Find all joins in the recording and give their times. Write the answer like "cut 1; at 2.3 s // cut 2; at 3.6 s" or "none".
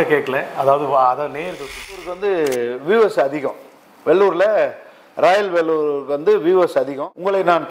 cut 1; at 2.1 s // cut 2; at 6.7 s